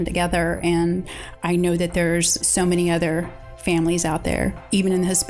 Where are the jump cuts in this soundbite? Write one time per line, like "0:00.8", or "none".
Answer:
0:01.2
0:02.4